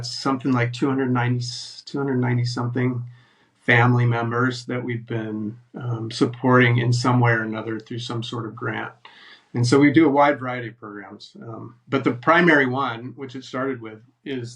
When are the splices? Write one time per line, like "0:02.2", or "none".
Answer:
none